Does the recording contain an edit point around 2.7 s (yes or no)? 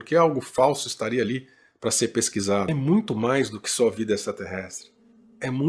yes